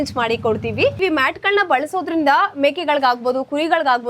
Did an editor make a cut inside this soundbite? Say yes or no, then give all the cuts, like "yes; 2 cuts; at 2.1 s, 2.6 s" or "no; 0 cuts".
yes; 1 cut; at 1.0 s